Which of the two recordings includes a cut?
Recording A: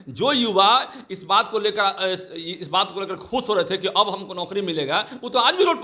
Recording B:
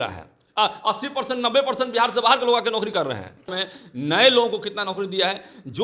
B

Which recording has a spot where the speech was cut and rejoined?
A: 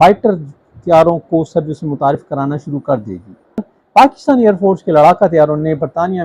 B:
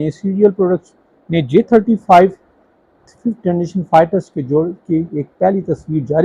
A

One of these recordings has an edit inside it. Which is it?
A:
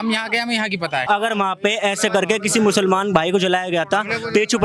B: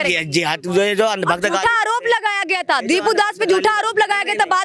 A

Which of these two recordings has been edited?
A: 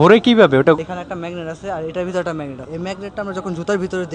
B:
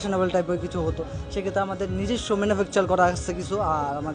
A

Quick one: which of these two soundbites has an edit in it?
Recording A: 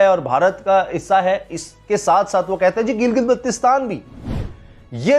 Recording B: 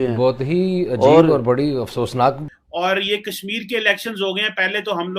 B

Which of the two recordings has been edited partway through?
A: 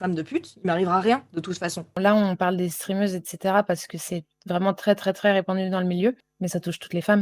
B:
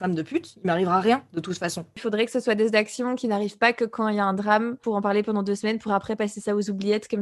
A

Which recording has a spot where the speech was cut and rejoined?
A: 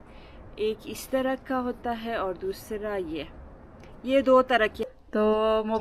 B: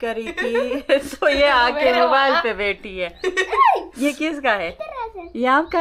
A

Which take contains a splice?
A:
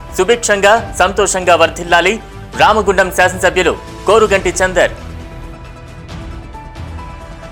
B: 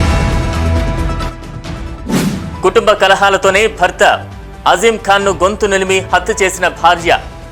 B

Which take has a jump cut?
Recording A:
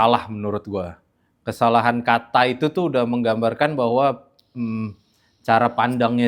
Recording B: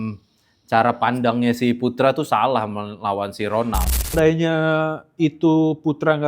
B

